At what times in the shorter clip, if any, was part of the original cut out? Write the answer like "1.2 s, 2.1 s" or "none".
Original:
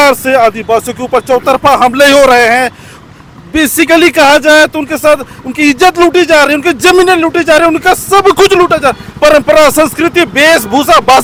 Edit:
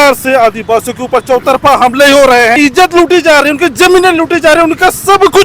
2.6 s